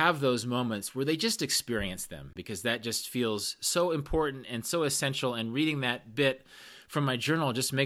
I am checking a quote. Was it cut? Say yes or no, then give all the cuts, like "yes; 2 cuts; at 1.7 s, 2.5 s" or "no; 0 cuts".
yes; 1 cut; at 2.4 s